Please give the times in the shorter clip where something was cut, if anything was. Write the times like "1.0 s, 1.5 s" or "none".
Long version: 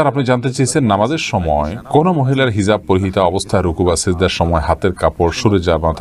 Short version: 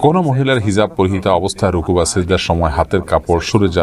none